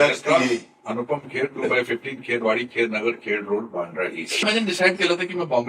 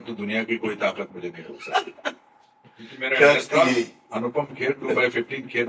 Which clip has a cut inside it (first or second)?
first